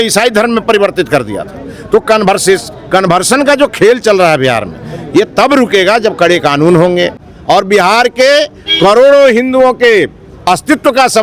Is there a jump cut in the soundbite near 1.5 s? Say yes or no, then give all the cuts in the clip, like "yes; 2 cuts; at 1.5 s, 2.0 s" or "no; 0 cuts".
no; 1 cut; at 7.2 s